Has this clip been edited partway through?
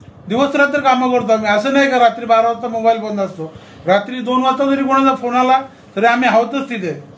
no; 0 cuts

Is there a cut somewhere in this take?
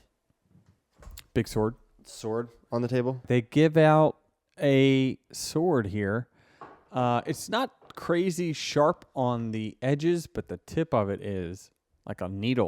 yes; 1 cut; at 3.2 s

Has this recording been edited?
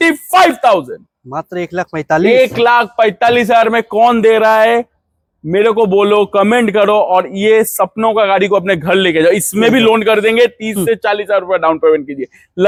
no; 0 cuts

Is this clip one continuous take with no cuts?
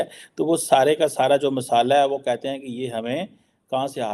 yes; 0 cuts

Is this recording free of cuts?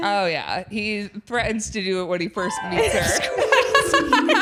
yes; 0 cuts

